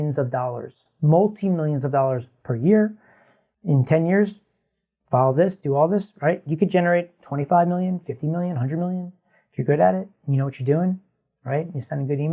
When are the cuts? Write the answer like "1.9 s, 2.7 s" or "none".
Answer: none